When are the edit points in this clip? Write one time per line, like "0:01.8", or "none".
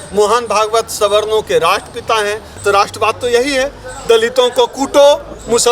0:02.6